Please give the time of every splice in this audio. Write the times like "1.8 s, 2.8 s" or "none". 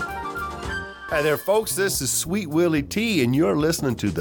1.0 s